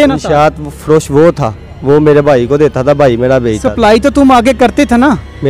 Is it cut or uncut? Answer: uncut